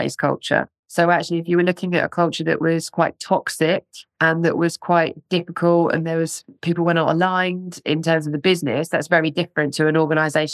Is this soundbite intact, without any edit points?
yes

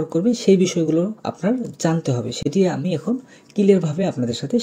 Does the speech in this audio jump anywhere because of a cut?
no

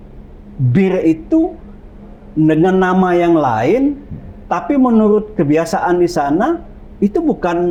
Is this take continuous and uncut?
yes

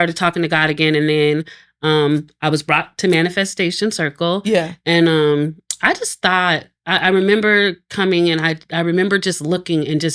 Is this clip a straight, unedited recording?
yes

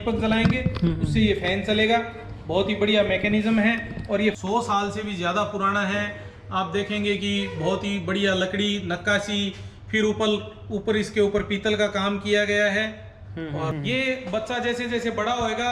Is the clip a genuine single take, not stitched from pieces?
no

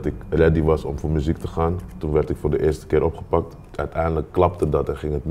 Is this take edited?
no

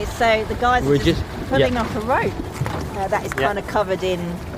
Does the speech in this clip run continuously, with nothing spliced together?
no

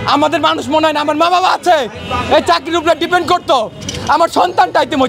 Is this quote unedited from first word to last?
yes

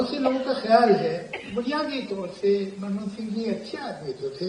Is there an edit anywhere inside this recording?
yes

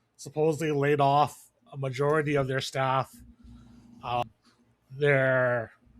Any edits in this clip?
yes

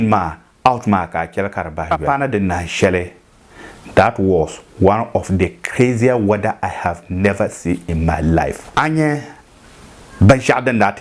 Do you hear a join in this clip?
yes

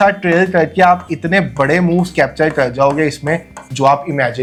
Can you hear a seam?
no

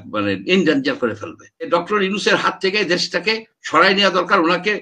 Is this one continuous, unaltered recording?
no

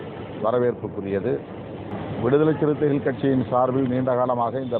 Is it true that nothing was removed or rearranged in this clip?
no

